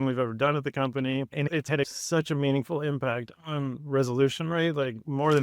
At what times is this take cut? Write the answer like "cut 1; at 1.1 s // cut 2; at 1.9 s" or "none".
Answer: cut 1; at 2.0 s